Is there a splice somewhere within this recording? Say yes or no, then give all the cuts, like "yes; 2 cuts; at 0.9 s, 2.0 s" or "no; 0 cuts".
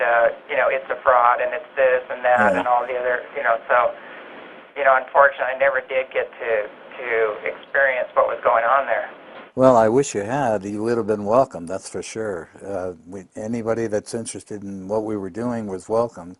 yes; 1 cut; at 5.4 s